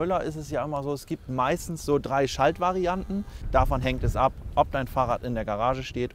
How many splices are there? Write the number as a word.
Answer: one